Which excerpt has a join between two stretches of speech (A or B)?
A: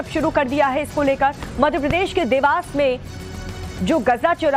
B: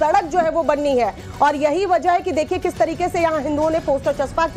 A